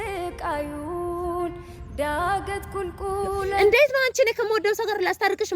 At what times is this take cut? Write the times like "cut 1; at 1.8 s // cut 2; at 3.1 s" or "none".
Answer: cut 1; at 3.6 s